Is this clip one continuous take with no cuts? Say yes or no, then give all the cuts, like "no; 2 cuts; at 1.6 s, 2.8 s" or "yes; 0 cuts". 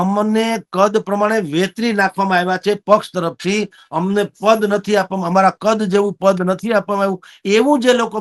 yes; 0 cuts